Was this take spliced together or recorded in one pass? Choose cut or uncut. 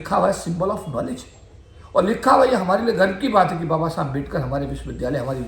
uncut